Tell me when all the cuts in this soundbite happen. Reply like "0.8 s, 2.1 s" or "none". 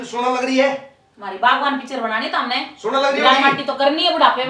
none